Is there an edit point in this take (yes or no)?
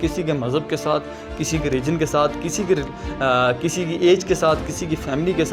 no